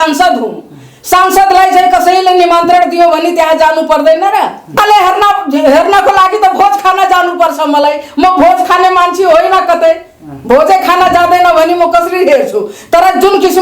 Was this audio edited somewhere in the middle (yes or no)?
yes